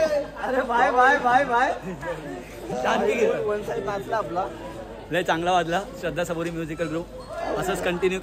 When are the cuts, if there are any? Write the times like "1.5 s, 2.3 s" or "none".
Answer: none